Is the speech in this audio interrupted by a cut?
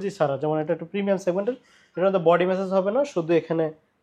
no; 0 cuts

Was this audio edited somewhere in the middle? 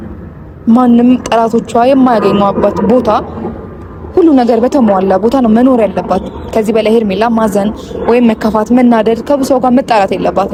no; 0 cuts

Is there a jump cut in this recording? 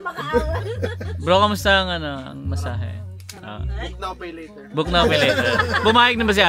no; 0 cuts

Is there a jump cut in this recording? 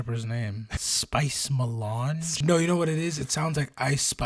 yes; 2 cuts; at 0.9 s, 2.4 s

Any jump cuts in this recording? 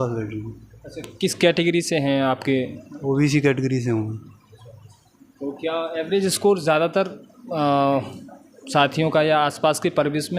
no; 0 cuts

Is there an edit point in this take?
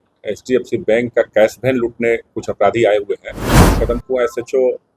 yes; 1 cut; at 3.8 s

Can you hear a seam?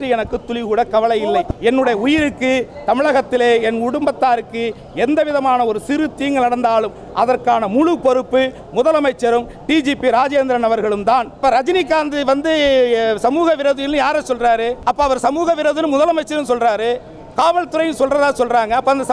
yes; 3 cuts; at 1.5 s, 11.4 s, 14.8 s

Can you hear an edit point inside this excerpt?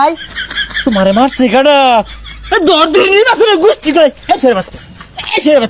no; 0 cuts

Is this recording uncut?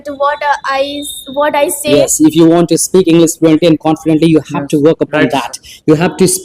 no; 1 cut; at 1.9 s

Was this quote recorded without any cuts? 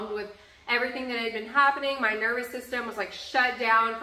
yes; 0 cuts

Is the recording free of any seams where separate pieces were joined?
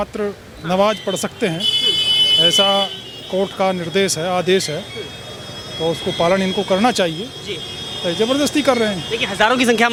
yes; 0 cuts

